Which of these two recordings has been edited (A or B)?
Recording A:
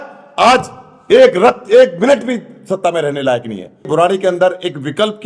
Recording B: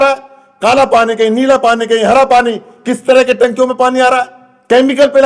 A